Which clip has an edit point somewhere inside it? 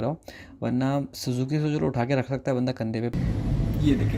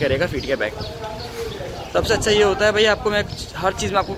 first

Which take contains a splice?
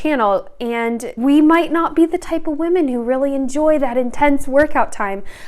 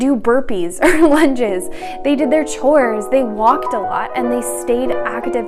first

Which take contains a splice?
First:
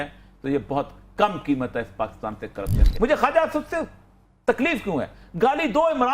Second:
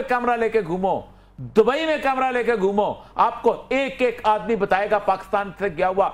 first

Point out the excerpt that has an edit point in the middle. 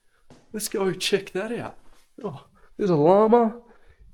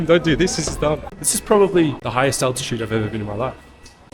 second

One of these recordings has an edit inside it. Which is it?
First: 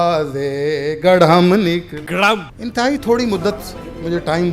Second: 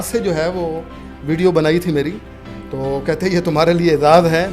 first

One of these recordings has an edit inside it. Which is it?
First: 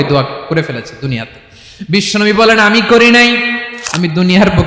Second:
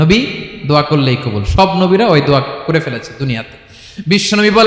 first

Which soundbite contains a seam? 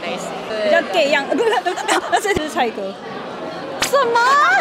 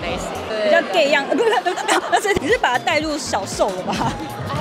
first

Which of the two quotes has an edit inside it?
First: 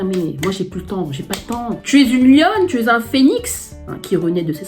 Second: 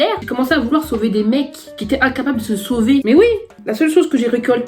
first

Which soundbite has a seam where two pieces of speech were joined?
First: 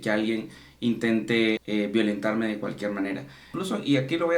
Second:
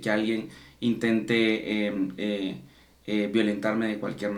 first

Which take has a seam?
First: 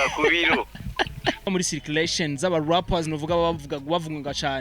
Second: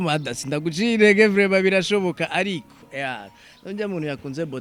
first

